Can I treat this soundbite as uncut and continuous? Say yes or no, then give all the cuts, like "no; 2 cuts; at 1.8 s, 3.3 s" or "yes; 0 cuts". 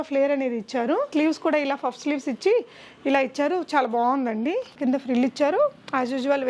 no; 2 cuts; at 1.1 s, 4.8 s